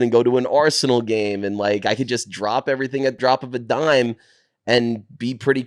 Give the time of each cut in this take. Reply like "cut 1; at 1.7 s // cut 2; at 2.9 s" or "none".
cut 1; at 3.2 s